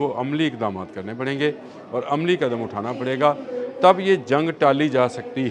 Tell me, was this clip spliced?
no; 0 cuts

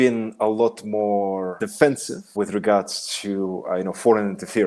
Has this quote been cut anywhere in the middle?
yes; 2 cuts; at 1.6 s, 2.3 s

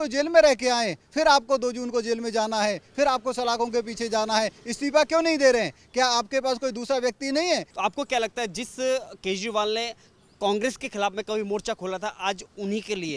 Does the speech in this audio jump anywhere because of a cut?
yes; 1 cut; at 7.7 s

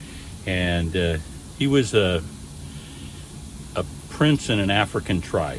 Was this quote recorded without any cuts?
yes; 0 cuts

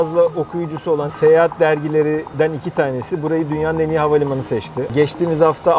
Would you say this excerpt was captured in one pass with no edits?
no; 3 cuts; at 1.1 s, 2.3 s, 4.9 s

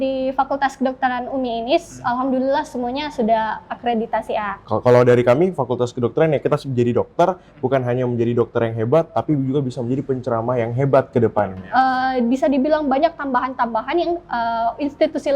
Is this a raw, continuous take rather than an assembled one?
no; 2 cuts; at 4.6 s, 11.4 s

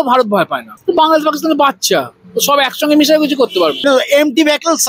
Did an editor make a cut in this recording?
yes; 1 cut; at 3.8 s

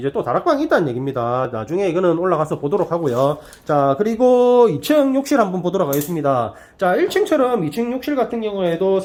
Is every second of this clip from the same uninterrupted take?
yes; 0 cuts

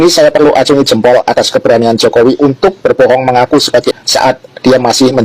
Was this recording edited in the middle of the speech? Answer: yes; 1 cut; at 3.9 s

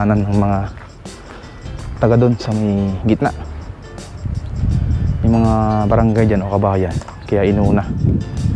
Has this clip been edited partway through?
no; 0 cuts

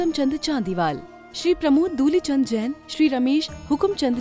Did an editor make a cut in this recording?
no; 0 cuts

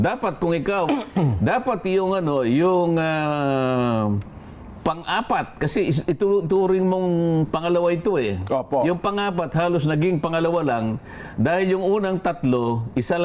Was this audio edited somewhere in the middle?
no; 0 cuts

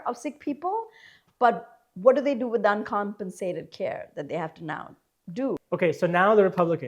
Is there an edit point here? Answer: yes; 1 cut; at 5.6 s

